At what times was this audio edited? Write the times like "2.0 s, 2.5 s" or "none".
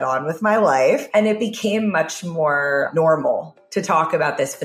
1.1 s, 2.9 s